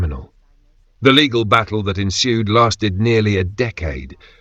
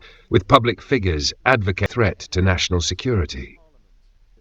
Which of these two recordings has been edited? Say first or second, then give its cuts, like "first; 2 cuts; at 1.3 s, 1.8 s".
second; 1 cut; at 1.8 s